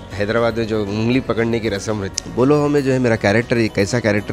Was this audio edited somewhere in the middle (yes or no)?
yes